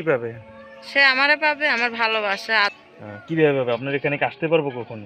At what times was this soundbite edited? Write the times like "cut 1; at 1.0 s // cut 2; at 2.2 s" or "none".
cut 1; at 2.7 s